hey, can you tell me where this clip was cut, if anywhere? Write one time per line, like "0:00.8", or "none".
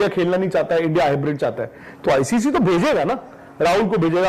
none